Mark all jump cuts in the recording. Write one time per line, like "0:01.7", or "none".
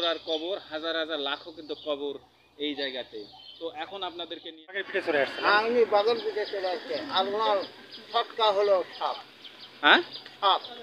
0:04.9